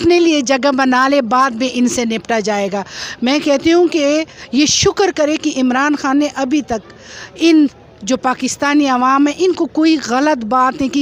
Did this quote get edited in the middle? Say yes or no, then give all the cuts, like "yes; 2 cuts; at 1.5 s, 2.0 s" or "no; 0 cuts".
no; 0 cuts